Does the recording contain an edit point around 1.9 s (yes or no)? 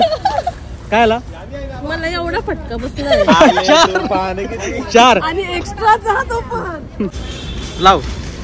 no